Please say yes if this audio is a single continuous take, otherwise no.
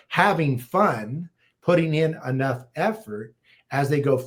yes